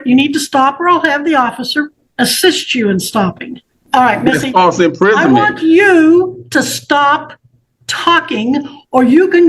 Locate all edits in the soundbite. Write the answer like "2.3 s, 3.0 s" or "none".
2.0 s, 3.7 s